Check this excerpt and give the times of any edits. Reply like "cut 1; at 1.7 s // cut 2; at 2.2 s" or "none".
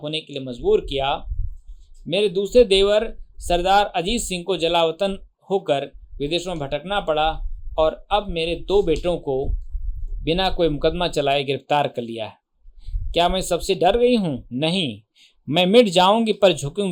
none